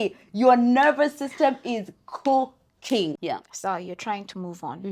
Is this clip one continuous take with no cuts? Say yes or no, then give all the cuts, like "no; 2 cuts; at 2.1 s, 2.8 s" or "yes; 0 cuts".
no; 1 cut; at 3.2 s